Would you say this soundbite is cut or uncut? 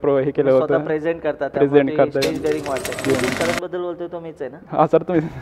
cut